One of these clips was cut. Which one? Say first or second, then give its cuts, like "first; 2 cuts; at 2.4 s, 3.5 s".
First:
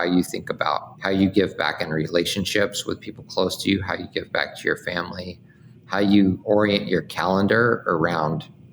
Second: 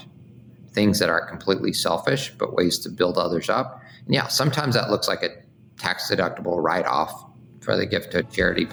first; 2 cuts; at 0.9 s, 6.4 s